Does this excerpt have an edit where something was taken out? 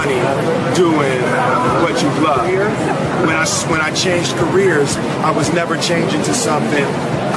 no; 0 cuts

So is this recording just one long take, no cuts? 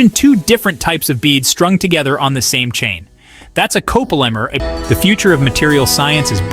no; 1 cut; at 4.6 s

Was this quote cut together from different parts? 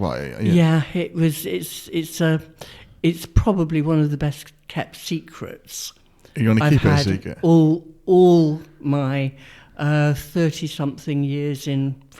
no; 0 cuts

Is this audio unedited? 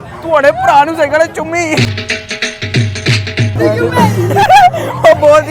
no; 2 cuts; at 3.5 s, 4.3 s

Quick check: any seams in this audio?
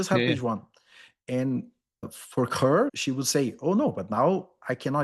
no; 0 cuts

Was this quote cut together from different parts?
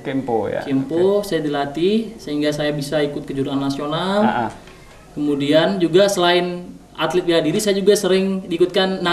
no; 0 cuts

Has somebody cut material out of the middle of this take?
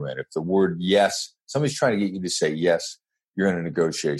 no; 0 cuts

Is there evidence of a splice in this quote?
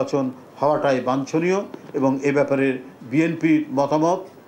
no; 0 cuts

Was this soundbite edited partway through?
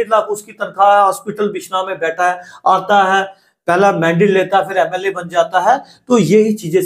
no; 0 cuts

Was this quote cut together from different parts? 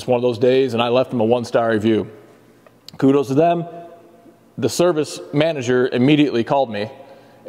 no; 0 cuts

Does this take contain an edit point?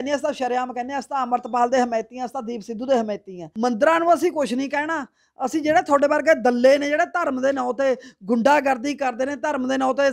yes; 1 cut; at 3.4 s

